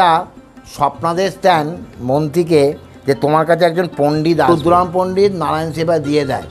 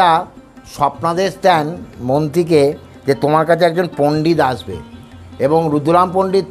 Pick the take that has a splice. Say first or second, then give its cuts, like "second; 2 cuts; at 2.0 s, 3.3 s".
first; 1 cut; at 4.5 s